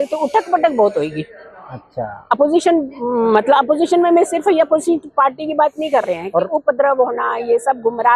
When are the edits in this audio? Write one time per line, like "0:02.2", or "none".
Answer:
none